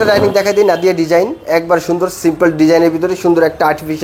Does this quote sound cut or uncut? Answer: uncut